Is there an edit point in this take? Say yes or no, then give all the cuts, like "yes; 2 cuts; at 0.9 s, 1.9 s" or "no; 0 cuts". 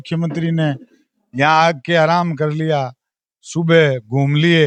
no; 0 cuts